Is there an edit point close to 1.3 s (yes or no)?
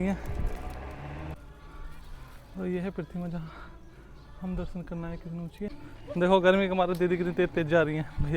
yes